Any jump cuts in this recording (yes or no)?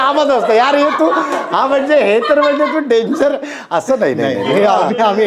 no